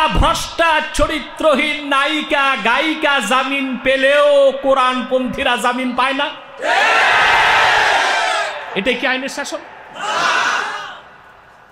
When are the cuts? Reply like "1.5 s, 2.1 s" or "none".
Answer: none